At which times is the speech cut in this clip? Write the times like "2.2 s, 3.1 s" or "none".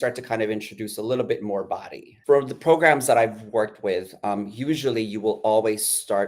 2.1 s